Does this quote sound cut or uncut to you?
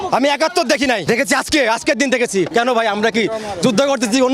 cut